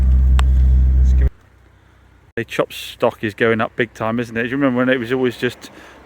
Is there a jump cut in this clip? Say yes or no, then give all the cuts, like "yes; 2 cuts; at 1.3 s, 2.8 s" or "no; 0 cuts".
yes; 1 cut; at 1.3 s